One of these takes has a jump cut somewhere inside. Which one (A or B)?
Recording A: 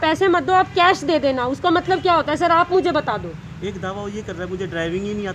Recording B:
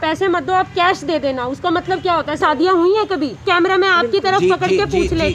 B